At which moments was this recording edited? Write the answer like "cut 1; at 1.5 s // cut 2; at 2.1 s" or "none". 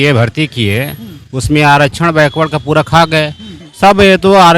cut 1; at 3.6 s